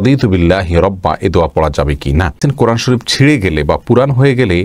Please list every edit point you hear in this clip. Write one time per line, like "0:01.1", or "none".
0:02.4